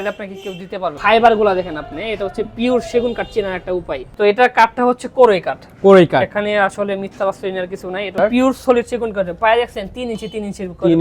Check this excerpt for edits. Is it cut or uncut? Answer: cut